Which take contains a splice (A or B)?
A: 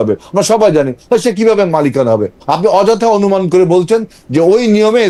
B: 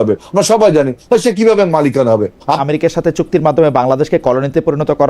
B